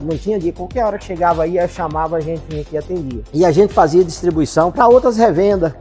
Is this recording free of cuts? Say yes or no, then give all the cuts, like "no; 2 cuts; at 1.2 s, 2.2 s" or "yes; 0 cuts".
yes; 0 cuts